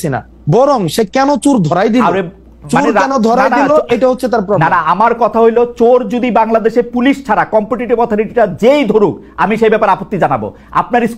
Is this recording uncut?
yes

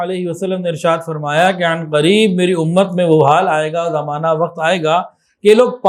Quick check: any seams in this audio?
no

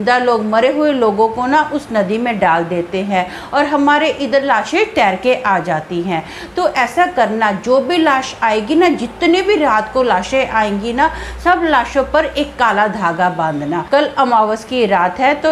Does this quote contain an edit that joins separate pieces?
yes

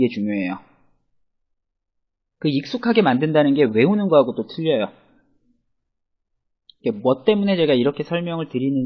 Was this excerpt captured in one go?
yes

